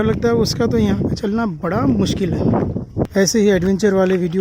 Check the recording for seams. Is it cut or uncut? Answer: cut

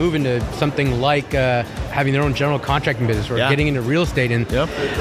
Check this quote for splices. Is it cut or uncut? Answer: cut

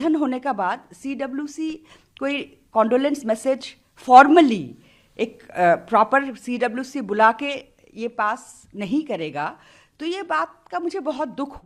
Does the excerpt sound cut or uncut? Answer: uncut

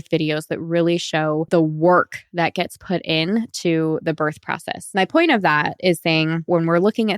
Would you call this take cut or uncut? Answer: cut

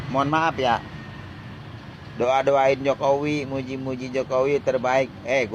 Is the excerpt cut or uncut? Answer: uncut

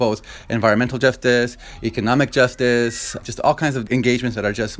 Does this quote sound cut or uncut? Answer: cut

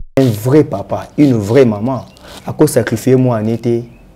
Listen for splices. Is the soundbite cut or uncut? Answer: uncut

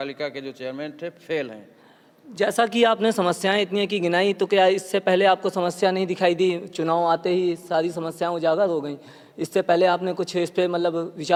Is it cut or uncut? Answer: uncut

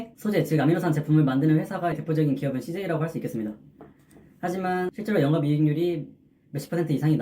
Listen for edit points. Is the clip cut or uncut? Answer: cut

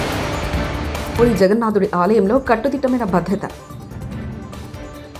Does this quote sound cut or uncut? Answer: uncut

